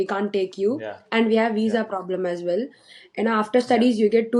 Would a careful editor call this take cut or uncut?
uncut